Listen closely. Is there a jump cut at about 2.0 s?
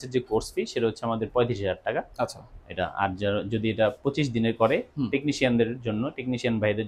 no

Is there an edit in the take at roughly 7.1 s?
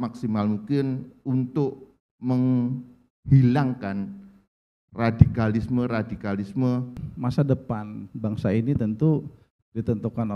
yes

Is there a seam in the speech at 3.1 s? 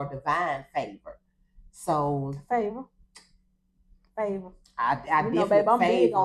no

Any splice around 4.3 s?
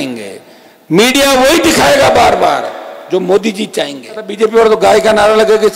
yes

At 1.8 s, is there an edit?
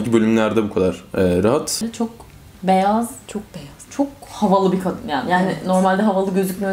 yes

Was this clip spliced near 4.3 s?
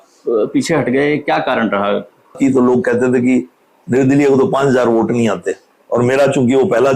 no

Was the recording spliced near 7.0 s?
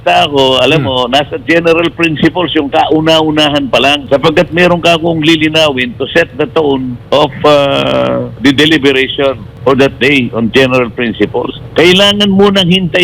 yes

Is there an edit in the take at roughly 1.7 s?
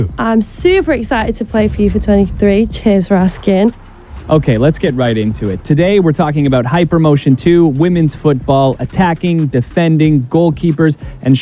yes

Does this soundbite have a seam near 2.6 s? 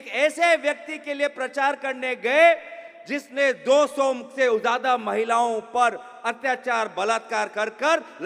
no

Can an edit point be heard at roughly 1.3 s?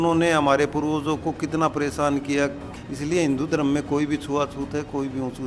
no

